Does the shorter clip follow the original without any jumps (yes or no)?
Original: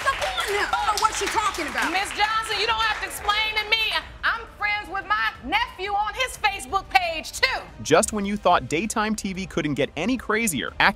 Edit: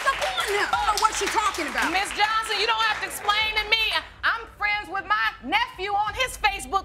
yes